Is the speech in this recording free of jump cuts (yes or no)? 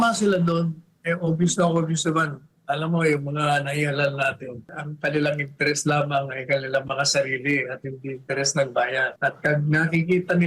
no